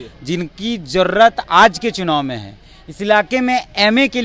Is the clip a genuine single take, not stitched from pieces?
yes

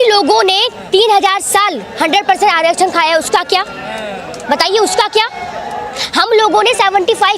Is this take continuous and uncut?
yes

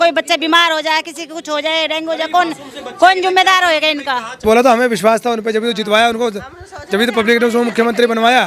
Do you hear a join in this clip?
yes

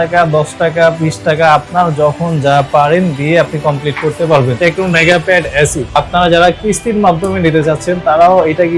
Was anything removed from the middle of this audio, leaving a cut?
yes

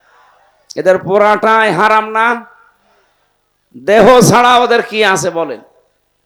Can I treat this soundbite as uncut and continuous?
yes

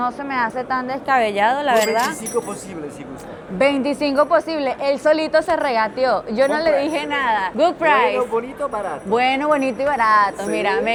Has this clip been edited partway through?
no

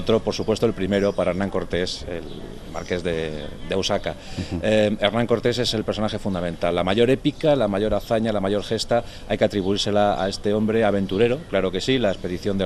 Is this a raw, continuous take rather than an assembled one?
no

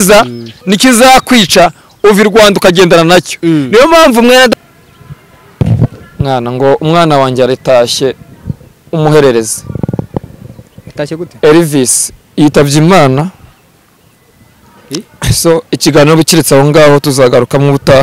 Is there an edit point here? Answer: yes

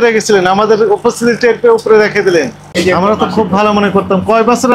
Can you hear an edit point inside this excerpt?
yes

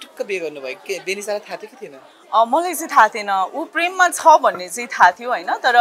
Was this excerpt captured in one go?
yes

